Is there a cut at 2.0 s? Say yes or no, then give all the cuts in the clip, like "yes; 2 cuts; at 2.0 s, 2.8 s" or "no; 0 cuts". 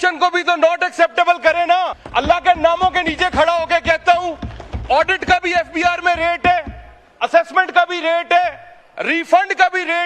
yes; 1 cut; at 2.0 s